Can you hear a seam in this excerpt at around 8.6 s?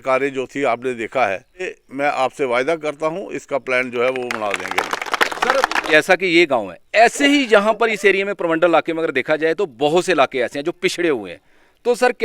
no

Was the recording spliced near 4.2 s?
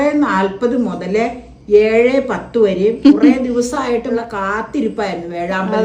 yes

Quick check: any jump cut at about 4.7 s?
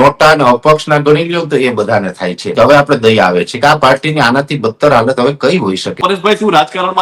no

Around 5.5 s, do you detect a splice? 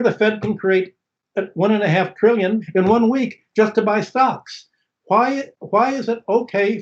no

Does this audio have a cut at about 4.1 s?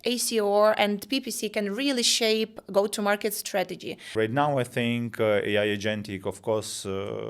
yes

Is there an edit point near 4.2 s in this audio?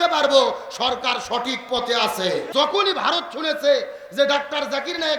no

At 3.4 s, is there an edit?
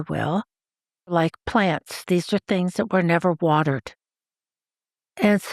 no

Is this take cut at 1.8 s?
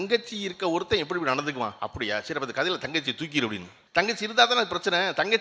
yes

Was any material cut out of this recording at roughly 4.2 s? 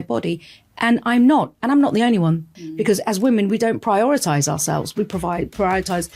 no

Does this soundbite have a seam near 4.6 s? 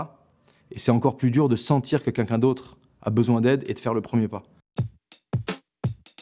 yes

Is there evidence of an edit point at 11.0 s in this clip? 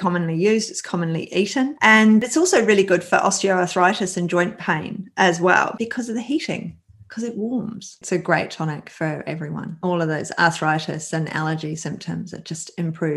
no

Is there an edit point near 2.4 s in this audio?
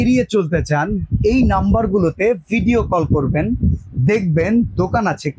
no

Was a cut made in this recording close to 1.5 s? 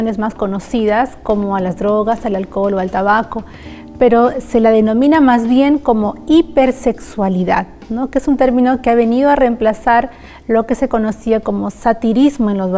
yes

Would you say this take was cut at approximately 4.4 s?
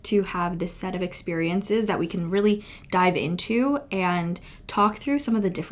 no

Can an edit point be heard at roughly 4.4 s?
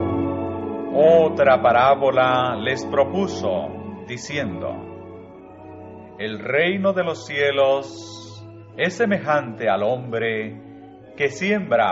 no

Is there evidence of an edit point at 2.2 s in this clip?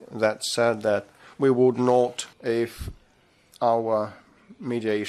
yes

